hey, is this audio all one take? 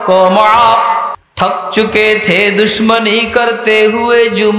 no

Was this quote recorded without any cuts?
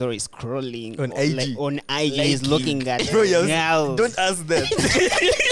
yes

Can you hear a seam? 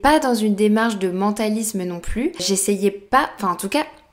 no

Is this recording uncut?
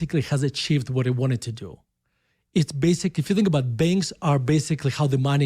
yes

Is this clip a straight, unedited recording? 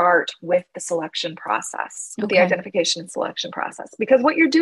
yes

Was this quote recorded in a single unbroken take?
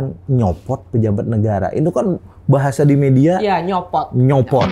yes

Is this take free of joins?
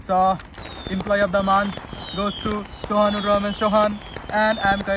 yes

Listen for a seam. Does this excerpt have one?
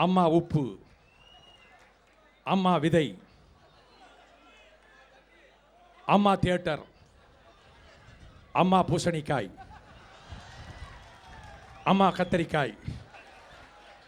no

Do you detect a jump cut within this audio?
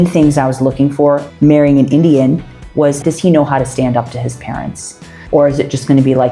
yes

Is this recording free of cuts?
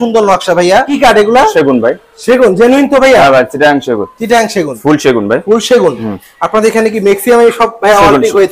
no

